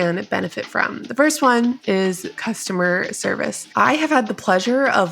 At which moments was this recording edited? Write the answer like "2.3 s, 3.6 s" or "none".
2.0 s, 3.6 s